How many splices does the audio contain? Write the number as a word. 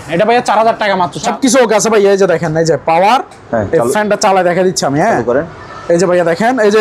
one